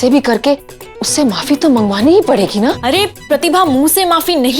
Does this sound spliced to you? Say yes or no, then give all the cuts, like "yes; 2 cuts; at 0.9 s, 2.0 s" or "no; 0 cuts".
yes; 2 cuts; at 1.0 s, 3.3 s